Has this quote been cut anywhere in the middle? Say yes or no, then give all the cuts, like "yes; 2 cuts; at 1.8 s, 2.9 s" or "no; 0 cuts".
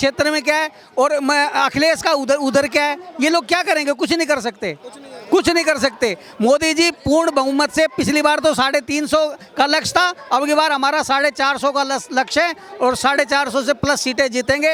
no; 0 cuts